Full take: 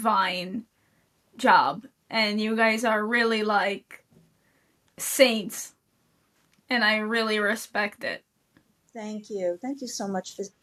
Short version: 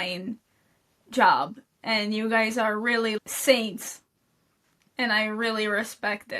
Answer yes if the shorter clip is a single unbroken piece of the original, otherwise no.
no